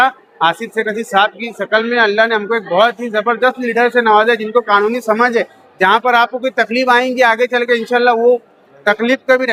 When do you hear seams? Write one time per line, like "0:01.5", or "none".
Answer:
none

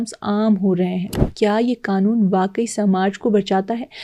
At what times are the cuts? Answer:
0:01.1

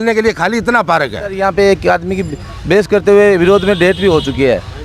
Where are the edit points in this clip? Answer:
0:01.4

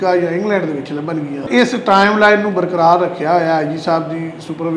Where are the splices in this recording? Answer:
0:01.4

